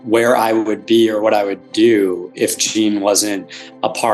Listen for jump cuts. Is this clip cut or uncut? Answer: uncut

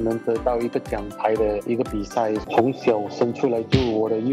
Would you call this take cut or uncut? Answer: cut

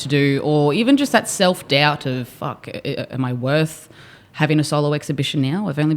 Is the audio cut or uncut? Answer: uncut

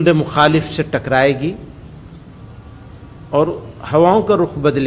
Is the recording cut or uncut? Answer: uncut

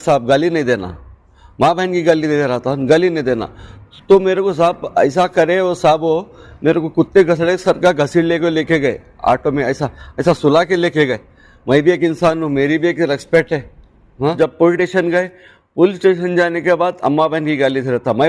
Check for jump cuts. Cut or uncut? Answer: cut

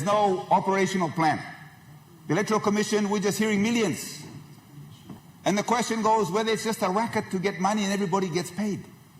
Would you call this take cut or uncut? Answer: cut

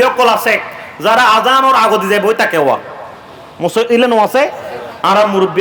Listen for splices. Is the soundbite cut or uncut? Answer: uncut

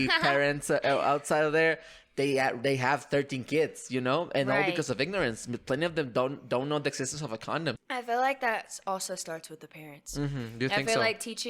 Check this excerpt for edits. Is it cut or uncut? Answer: cut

